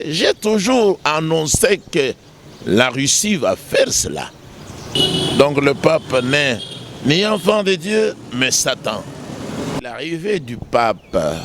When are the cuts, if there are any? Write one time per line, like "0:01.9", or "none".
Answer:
0:04.9
0:09.8